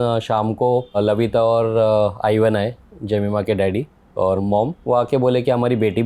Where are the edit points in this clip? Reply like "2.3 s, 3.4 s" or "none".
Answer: 1.0 s, 4.4 s

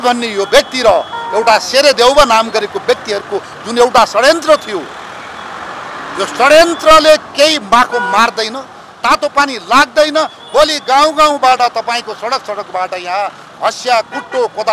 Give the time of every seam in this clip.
none

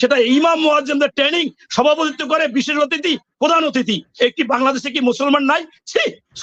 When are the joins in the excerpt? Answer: none

